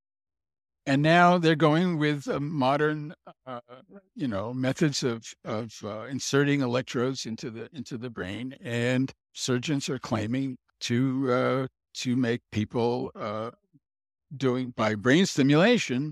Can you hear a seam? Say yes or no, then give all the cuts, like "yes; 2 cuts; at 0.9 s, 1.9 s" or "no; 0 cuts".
yes; 2 cuts; at 9.3 s, 10.6 s